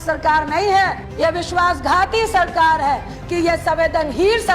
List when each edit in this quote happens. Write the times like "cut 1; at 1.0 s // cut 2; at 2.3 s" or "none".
cut 1; at 1.0 s // cut 2; at 3.1 s